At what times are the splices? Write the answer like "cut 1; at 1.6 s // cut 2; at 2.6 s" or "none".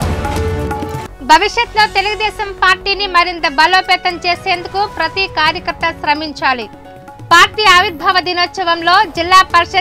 cut 1; at 1.0 s